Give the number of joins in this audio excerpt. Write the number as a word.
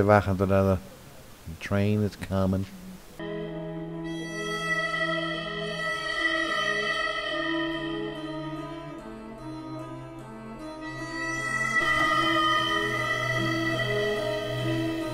zero